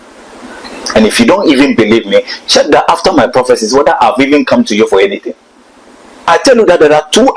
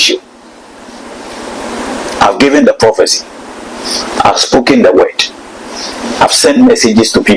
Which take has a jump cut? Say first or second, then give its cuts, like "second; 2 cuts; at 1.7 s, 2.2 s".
first; 1 cut; at 6.3 s